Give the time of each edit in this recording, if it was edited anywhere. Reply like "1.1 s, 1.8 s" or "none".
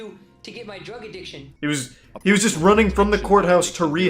1.4 s